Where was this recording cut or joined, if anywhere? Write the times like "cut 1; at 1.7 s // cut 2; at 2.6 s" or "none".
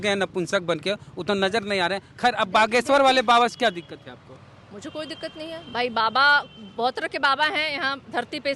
none